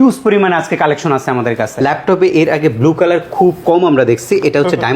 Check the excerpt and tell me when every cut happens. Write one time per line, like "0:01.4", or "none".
0:01.7